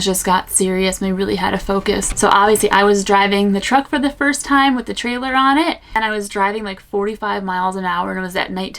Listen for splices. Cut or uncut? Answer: cut